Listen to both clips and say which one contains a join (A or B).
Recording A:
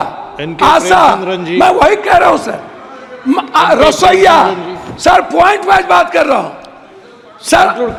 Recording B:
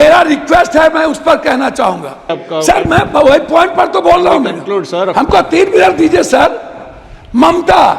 B